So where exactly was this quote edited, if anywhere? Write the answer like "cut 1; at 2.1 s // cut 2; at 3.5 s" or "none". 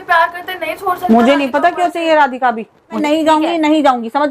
cut 1; at 3.0 s